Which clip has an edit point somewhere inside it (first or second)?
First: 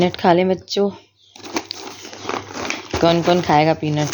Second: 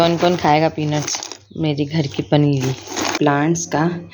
second